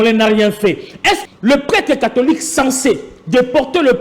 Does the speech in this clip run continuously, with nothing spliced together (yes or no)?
no